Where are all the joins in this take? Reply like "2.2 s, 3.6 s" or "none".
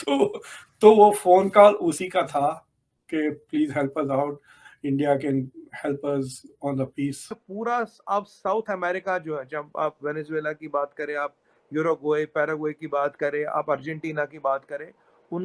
7.4 s